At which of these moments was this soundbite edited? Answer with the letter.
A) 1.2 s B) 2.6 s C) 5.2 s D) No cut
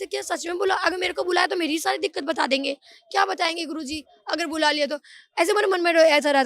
D